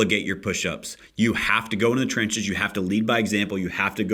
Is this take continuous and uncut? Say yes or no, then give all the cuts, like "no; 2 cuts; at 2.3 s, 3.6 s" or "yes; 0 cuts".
yes; 0 cuts